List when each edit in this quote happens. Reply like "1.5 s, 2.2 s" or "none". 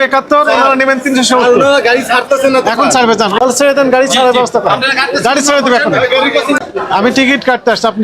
3.4 s, 6.6 s